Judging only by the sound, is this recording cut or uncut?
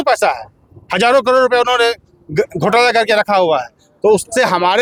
uncut